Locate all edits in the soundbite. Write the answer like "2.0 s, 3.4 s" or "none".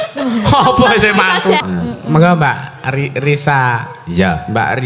1.6 s